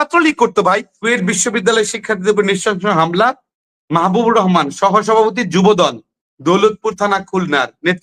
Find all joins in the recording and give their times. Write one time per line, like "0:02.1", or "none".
0:00.9

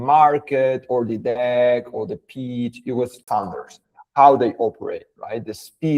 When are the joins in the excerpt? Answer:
0:03.2

